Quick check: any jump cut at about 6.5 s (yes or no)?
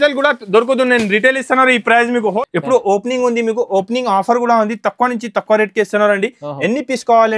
no